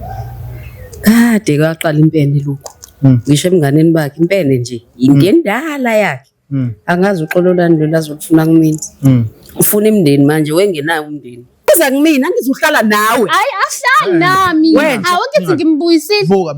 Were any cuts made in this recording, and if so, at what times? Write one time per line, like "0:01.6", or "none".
0:11.7